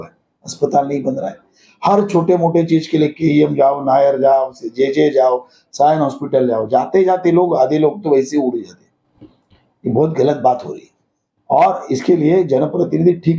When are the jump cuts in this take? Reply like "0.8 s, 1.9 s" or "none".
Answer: none